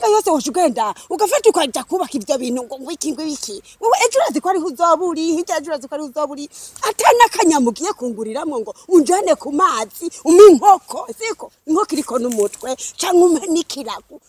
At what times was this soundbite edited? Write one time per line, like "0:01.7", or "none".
none